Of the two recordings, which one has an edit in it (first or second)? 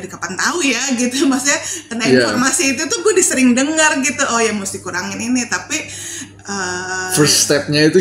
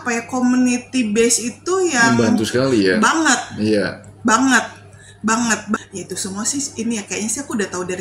second